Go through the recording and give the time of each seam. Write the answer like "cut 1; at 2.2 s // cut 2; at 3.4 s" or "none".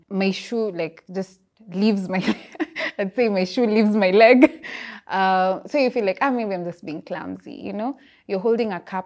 none